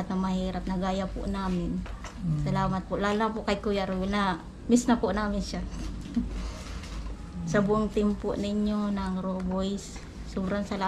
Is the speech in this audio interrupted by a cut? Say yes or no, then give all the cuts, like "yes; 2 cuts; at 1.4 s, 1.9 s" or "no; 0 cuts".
no; 0 cuts